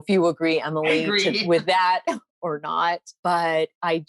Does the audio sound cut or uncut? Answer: cut